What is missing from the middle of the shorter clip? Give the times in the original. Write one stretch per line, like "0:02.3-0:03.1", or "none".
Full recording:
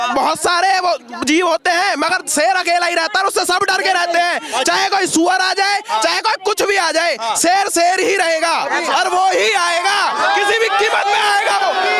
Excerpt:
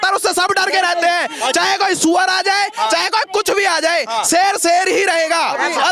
none